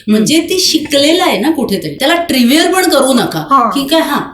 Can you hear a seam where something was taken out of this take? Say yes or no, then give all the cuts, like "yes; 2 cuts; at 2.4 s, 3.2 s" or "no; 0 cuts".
yes; 1 cut; at 2.0 s